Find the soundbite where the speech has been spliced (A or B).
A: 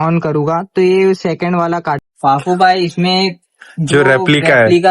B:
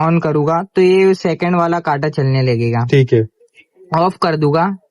A